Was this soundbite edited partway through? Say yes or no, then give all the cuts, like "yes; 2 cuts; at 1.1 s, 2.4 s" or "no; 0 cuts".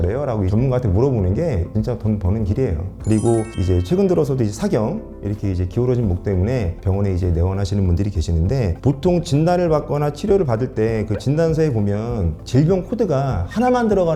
no; 0 cuts